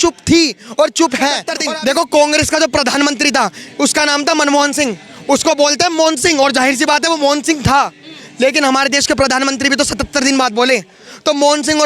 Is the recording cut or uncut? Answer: cut